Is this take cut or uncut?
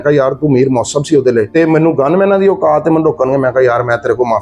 cut